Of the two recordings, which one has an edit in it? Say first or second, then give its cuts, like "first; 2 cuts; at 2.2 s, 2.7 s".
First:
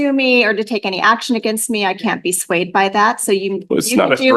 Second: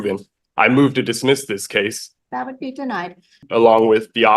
second; 2 cuts; at 2.1 s, 3.4 s